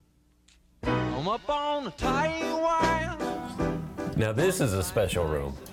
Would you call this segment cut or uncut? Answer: cut